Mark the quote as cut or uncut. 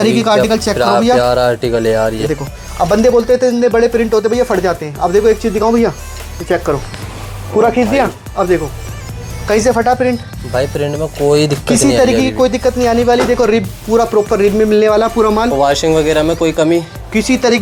uncut